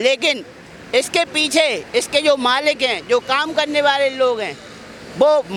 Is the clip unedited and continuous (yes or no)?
yes